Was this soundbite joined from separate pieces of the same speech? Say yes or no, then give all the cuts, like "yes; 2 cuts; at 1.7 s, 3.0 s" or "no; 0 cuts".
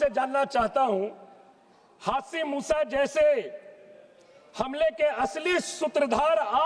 no; 0 cuts